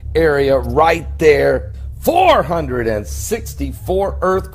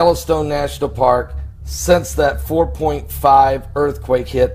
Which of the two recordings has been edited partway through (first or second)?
first